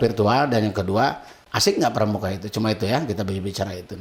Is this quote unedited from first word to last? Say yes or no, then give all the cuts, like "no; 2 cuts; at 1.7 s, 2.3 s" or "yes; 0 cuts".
yes; 0 cuts